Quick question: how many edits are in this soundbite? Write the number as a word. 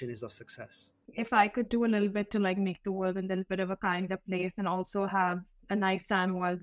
one